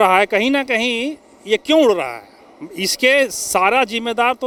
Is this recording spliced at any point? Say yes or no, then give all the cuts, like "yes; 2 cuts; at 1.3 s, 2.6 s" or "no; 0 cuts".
no; 0 cuts